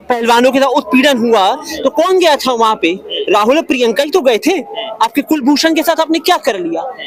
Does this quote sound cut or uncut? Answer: uncut